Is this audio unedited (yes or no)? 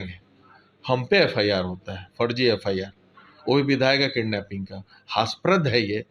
yes